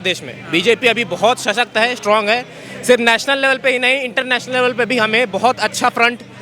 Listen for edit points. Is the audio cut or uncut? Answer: uncut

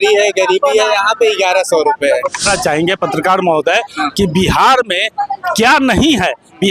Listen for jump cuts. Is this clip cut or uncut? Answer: cut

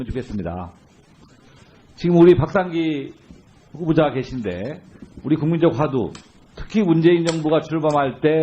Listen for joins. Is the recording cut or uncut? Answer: cut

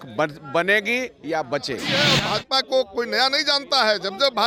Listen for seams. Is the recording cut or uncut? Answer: cut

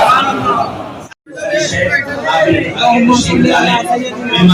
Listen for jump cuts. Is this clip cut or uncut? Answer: cut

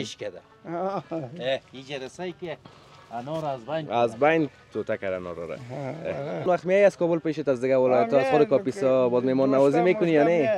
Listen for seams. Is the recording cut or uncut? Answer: cut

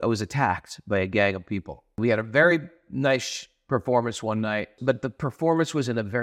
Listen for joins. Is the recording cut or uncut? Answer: cut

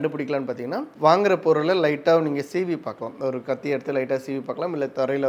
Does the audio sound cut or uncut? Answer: uncut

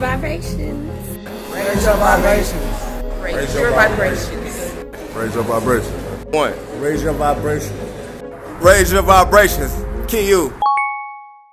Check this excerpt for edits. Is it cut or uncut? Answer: cut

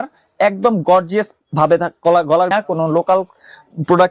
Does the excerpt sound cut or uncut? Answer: cut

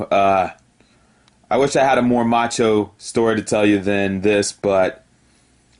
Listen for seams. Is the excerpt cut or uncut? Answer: uncut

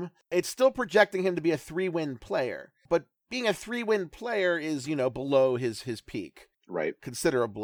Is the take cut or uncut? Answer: cut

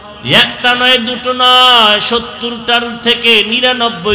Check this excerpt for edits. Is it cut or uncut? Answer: uncut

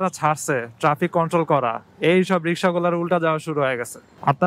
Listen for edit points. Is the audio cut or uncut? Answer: uncut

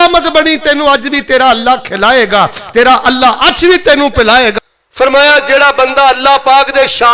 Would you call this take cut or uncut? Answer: cut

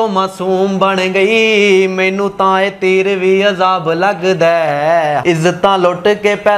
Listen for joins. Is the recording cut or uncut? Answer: cut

